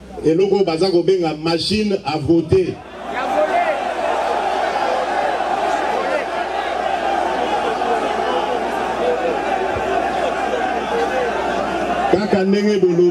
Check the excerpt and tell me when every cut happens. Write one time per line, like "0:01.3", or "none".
none